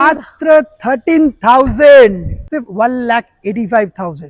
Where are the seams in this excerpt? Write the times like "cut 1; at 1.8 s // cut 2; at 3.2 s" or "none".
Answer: cut 1; at 2.5 s

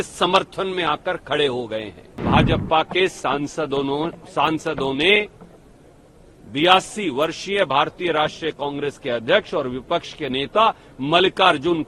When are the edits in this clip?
cut 1; at 2.2 s

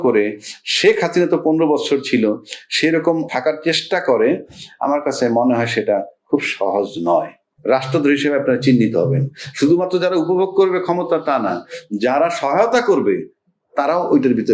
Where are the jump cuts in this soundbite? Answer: cut 1; at 3.3 s // cut 2; at 7.4 s

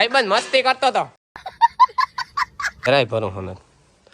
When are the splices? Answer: cut 1; at 1.2 s // cut 2; at 2.9 s

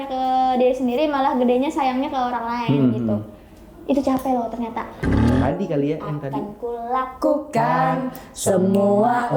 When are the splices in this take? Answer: cut 1; at 5.2 s

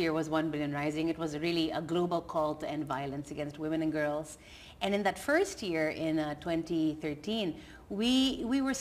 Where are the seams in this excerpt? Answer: cut 1; at 2.8 s

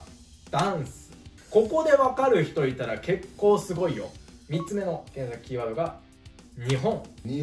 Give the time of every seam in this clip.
none

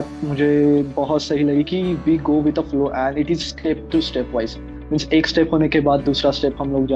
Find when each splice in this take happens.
none

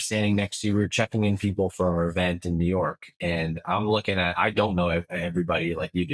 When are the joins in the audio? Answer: none

